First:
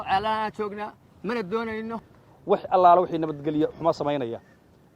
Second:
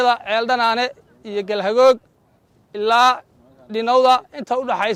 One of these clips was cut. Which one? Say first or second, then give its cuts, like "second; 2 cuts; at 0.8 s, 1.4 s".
first; 1 cut; at 1.9 s